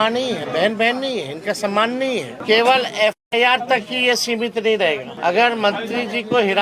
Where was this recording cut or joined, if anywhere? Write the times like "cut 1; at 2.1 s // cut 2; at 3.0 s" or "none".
cut 1; at 2.3 s // cut 2; at 5.1 s